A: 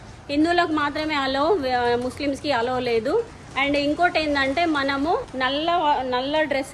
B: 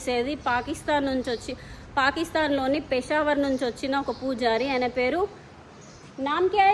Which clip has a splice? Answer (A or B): A